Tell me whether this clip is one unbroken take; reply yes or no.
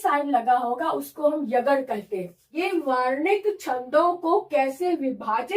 no